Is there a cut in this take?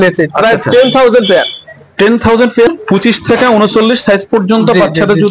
yes; 1 cut; at 2.7 s

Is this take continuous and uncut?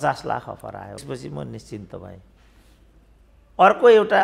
no; 1 cut; at 1.0 s

